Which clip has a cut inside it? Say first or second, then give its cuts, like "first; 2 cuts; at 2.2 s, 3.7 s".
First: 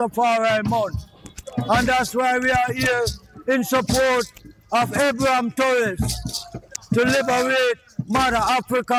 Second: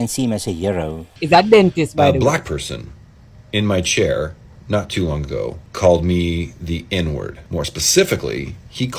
second; 3 cuts; at 1.1 s, 5.6 s, 7.4 s